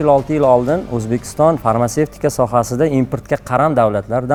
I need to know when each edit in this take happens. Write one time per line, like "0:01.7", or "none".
none